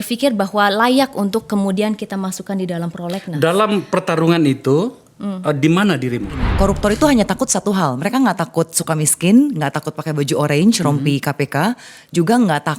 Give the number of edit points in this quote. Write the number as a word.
one